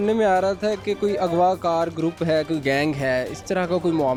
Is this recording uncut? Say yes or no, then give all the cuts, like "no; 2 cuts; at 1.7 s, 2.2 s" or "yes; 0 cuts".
yes; 0 cuts